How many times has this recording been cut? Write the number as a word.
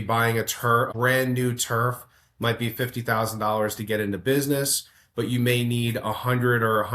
one